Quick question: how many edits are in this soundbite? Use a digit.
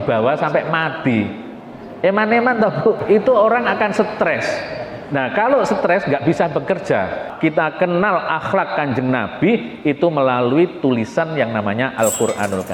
2